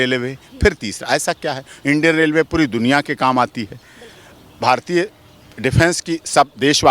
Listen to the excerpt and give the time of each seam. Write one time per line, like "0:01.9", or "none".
none